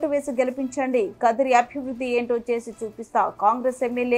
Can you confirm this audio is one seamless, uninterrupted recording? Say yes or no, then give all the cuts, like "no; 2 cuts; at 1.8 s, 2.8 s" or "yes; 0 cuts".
yes; 0 cuts